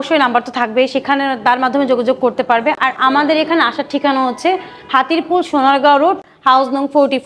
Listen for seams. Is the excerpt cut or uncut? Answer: uncut